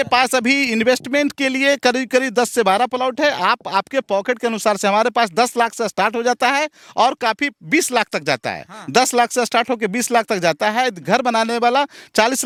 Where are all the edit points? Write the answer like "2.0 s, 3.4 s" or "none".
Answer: none